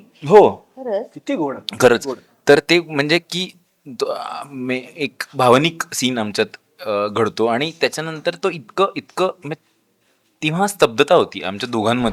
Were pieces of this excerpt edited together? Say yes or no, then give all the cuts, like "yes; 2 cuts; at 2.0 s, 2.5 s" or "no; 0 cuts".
no; 0 cuts